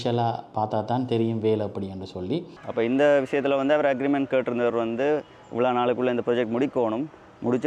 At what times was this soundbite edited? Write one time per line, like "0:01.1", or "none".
0:02.5